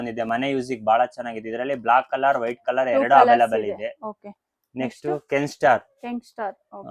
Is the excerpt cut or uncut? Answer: uncut